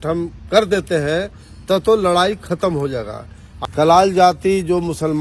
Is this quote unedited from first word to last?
no; 1 cut; at 3.4 s

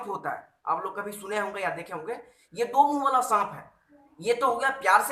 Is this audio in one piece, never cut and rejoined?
yes; 0 cuts

